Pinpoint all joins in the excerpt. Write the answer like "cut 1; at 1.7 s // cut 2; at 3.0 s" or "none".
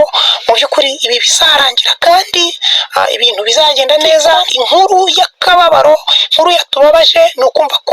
cut 1; at 4.5 s